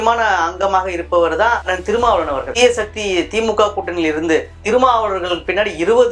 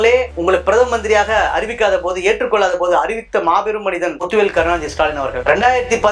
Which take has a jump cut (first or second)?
first